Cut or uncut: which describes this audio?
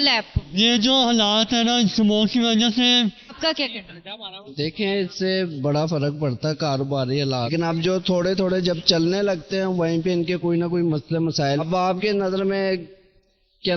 cut